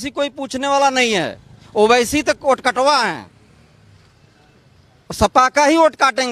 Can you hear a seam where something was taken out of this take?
no; 0 cuts

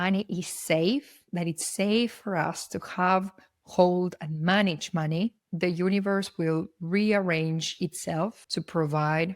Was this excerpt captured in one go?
no; 1 cut; at 8.4 s

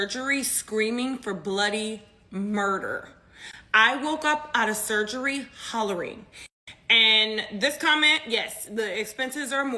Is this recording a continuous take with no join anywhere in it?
yes; 0 cuts

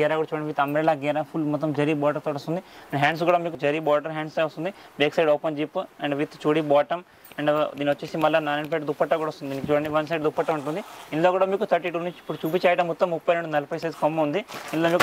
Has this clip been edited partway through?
no; 0 cuts

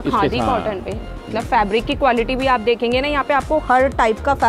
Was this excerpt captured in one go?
no; 1 cut; at 1.2 s

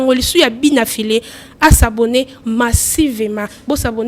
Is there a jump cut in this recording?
no; 0 cuts

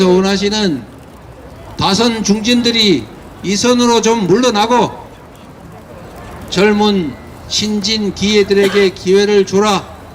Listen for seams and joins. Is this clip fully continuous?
yes; 0 cuts

